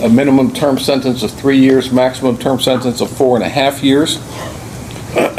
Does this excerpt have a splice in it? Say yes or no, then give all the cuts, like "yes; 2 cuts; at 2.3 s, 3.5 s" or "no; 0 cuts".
no; 0 cuts